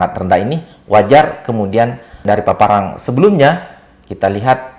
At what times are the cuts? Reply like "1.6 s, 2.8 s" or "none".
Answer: none